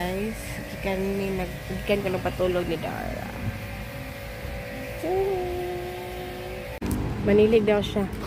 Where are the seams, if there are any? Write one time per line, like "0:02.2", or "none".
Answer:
0:07.2